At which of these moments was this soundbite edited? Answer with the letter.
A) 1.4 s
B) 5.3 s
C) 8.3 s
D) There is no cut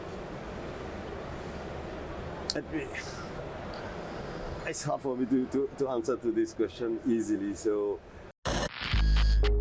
C